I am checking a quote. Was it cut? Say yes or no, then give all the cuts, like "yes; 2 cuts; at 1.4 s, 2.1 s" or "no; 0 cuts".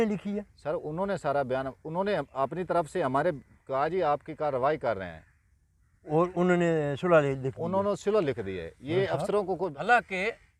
yes; 1 cut; at 9.7 s